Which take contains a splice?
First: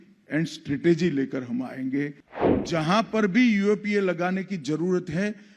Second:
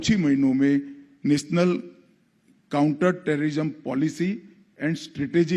first; 1 cut; at 2.3 s

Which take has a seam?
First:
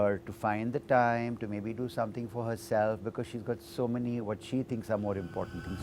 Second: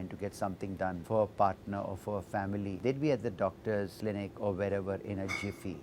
second; 3 cuts; at 1.0 s, 2.7 s, 3.9 s

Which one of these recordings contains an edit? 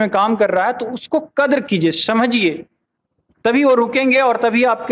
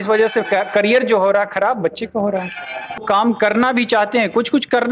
second; 1 cut; at 3.0 s

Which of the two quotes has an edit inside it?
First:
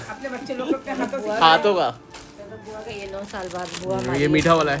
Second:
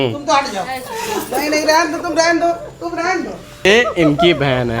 second; 1 cut; at 3.6 s

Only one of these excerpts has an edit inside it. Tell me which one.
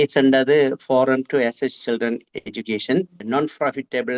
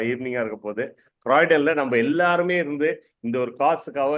first; 1 cut; at 3.2 s

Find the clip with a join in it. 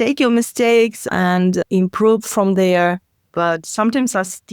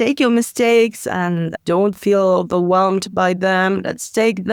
first; 1 cut; at 1.1 s

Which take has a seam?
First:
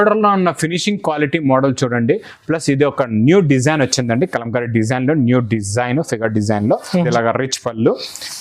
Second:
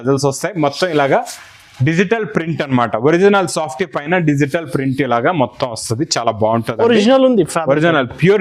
first; 1 cut; at 7.1 s

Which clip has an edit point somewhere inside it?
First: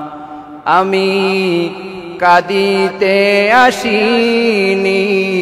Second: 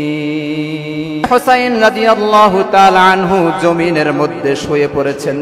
second; 1 cut; at 1.3 s

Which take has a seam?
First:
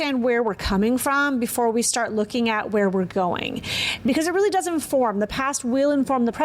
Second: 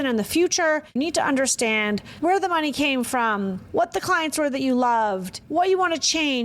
second; 4 cuts; at 0.9 s, 2.1 s, 3.6 s, 5.3 s

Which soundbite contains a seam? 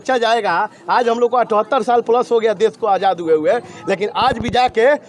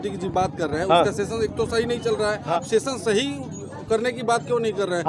second; 1 cut; at 2.5 s

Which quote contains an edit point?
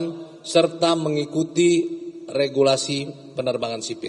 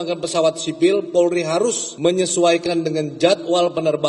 second; 1 cut; at 1.9 s

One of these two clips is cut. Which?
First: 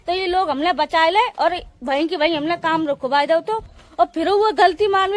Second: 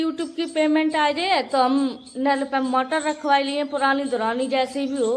first; 1 cut; at 3.7 s

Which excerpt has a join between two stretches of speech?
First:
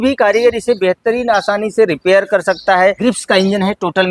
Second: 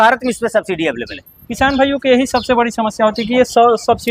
first; 1 cut; at 3.0 s

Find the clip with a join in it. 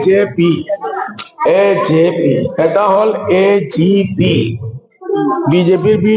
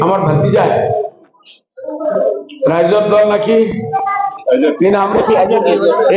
first; 2 cuts; at 0.9 s, 2.5 s

